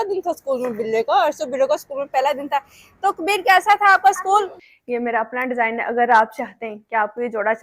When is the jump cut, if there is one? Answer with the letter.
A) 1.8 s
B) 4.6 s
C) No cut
B